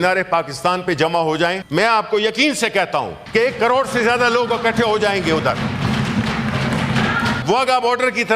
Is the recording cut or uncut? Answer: cut